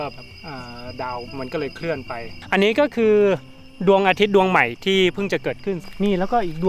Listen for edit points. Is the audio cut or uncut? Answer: cut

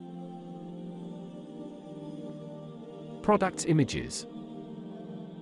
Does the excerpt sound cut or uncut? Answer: cut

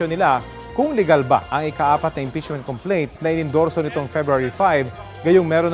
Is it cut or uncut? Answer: uncut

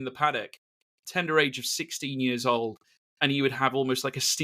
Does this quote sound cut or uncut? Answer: uncut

